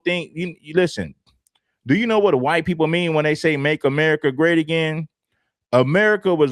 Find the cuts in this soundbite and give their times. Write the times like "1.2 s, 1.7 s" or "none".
1.2 s